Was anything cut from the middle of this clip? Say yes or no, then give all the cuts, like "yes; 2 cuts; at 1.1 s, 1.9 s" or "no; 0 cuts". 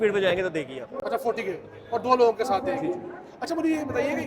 no; 0 cuts